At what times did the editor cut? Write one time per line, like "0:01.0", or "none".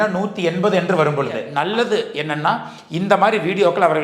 0:01.5